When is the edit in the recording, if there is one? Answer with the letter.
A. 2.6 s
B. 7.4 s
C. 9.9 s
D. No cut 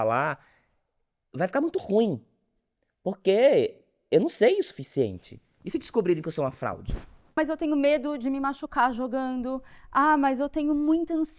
B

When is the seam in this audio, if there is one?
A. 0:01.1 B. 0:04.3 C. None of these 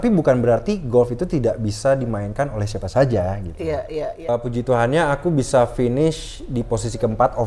B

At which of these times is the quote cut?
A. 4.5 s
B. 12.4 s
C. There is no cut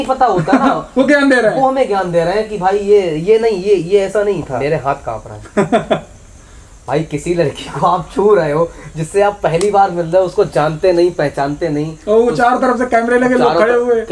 A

